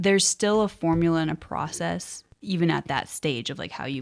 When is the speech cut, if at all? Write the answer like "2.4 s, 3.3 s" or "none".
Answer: none